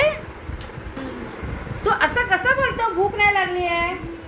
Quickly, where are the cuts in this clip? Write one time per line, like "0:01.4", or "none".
none